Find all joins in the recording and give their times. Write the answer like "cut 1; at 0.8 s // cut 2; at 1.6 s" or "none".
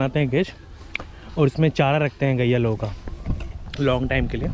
none